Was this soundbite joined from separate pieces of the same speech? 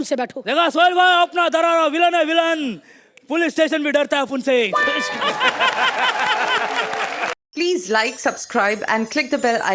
yes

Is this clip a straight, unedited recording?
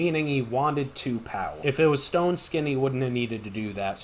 no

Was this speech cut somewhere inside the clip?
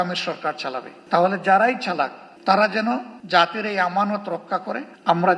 no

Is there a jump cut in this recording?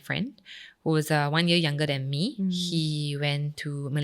yes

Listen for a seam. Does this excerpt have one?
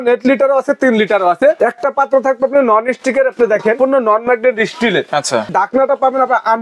yes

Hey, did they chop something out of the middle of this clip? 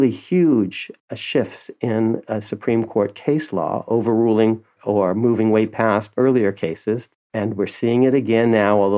yes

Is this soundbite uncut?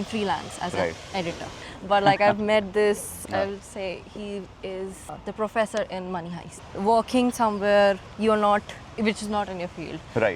no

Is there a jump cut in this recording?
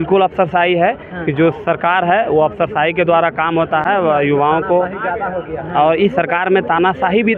no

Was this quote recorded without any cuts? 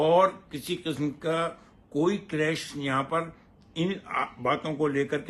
yes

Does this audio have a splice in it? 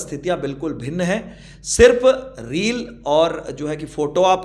no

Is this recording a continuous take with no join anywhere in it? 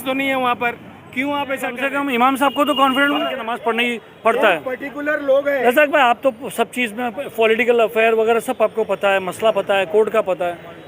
no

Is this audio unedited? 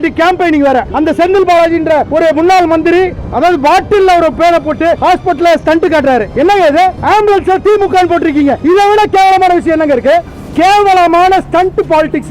yes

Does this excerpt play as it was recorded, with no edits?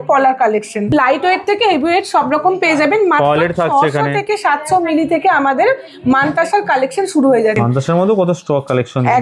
no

